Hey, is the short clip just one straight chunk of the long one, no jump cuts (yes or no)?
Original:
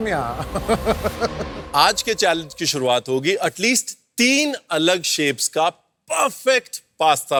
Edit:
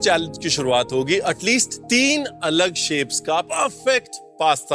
no